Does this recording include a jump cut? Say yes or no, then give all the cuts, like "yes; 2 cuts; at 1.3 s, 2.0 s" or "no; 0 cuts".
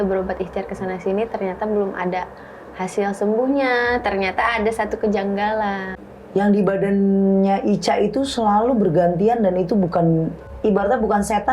yes; 2 cuts; at 5.9 s, 10.4 s